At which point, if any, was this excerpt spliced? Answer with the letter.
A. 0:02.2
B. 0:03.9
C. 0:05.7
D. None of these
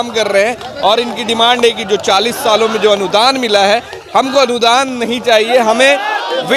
D